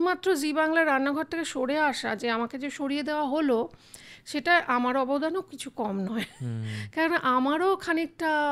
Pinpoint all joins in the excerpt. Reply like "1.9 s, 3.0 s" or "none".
none